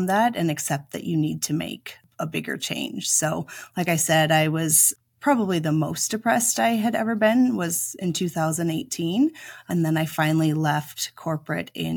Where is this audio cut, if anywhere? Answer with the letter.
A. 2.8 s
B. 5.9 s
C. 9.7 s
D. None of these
C